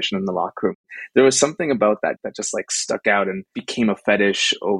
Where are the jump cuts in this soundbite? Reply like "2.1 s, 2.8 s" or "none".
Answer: 0.8 s, 2.2 s, 3.5 s